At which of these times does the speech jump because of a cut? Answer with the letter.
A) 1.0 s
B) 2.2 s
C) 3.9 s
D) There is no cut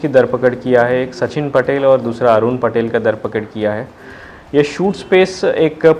D